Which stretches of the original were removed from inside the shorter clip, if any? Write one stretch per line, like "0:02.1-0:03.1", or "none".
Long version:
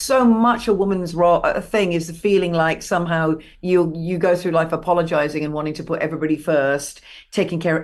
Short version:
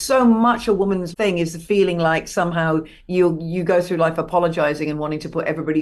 0:01.1-0:01.6